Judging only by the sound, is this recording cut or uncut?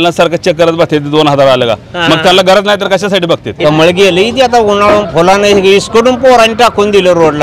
cut